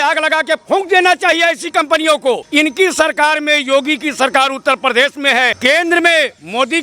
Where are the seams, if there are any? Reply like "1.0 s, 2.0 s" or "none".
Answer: 2.4 s, 5.6 s